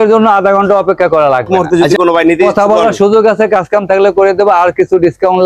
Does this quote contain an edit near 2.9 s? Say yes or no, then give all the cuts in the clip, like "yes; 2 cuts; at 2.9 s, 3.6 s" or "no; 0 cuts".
no; 1 cut; at 1.5 s